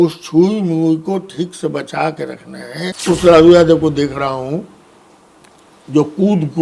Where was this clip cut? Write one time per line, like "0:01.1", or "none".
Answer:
0:03.0